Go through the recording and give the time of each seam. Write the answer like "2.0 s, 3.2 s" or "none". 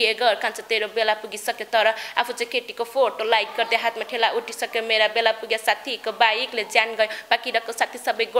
none